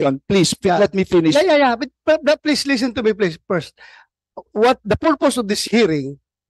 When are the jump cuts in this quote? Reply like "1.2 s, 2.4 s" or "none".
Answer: none